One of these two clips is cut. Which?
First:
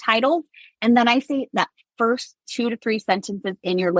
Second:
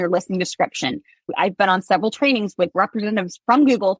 second; 2 cuts; at 1.3 s, 2.7 s

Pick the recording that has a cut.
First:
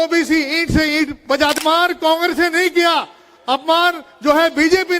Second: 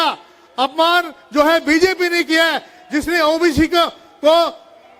first; 1 cut; at 1.6 s

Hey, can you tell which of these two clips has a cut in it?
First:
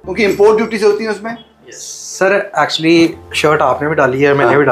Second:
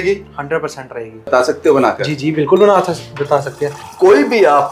second; 2 cuts; at 1.2 s, 3.8 s

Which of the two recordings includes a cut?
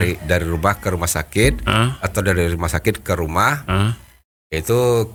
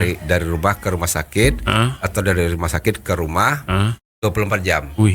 second; 1 cut; at 4.0 s

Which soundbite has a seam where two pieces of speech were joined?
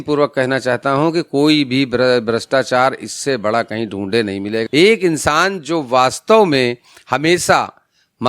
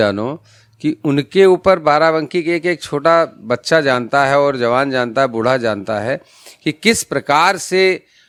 first; 1 cut; at 4.6 s

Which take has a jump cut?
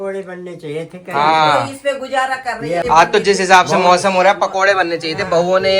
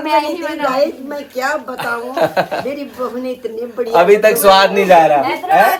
first; 1 cut; at 2.8 s

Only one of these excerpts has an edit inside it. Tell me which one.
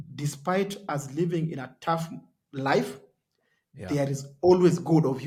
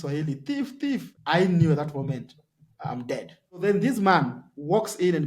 second; 2 cuts; at 1.1 s, 3.6 s

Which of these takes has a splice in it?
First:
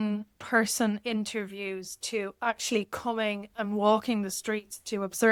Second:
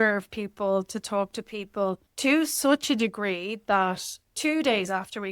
second; 2 cuts; at 2.1 s, 4.2 s

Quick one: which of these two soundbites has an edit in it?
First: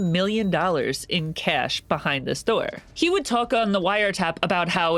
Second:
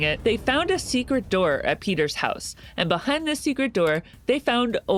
first; 1 cut; at 2.8 s

